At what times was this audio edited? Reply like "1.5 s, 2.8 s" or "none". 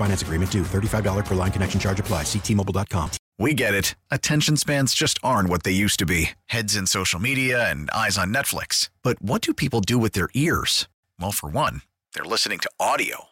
3.2 s